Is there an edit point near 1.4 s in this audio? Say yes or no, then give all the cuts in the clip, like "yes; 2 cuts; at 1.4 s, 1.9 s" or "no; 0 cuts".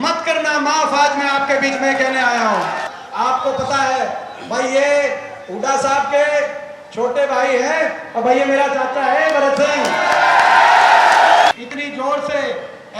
no; 2 cuts; at 2.9 s, 11.5 s